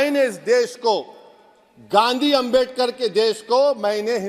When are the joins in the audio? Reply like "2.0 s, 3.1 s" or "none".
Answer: none